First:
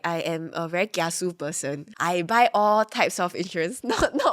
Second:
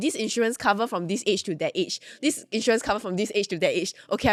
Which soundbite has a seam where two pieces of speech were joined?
first; 1 cut; at 1.8 s

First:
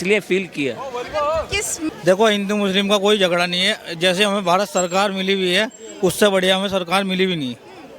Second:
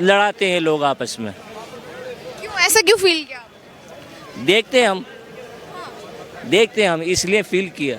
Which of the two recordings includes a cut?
first; 1 cut; at 1.8 s

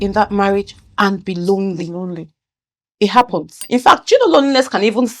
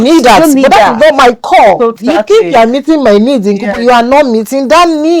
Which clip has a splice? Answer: first; 1 cut; at 3.5 s

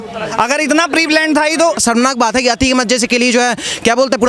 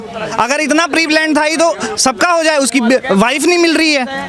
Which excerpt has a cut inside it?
first; 1 cut; at 1.8 s

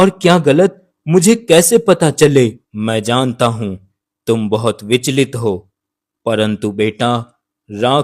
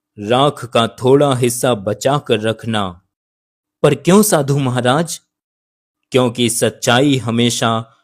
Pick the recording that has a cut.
first; 1 cut; at 2.6 s

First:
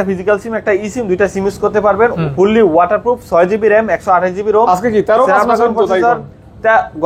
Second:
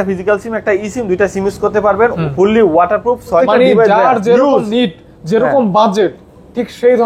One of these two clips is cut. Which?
second; 1 cut; at 3.4 s

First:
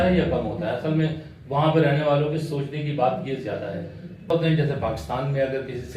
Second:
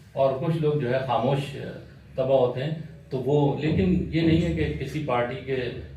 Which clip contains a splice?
first; 1 cut; at 4.3 s

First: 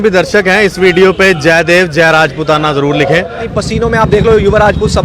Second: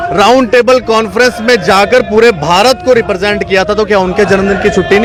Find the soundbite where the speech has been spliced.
first; 1 cut; at 3.5 s

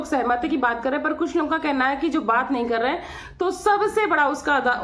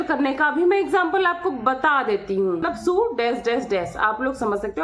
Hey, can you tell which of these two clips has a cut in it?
second; 1 cut; at 2.7 s

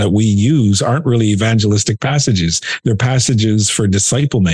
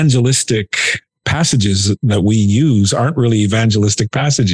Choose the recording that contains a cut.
second; 1 cut; at 1.0 s

